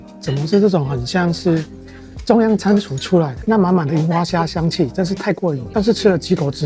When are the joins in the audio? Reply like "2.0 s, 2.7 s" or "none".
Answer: 3.4 s